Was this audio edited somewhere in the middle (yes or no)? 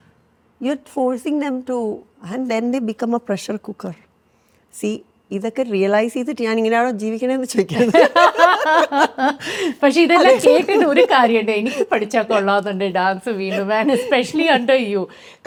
no